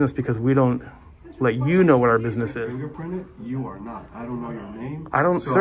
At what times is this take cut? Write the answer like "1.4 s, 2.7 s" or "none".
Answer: 2.6 s